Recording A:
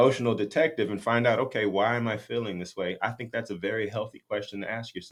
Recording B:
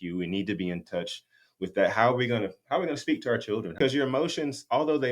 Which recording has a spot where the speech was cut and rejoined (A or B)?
B